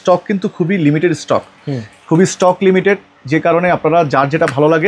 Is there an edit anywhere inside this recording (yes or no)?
no